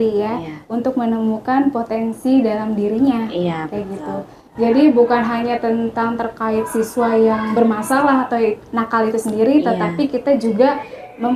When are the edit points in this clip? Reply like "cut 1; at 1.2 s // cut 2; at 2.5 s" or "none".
none